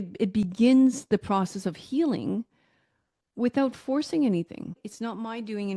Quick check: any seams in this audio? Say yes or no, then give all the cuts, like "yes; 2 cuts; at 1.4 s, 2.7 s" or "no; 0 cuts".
yes; 1 cut; at 4.9 s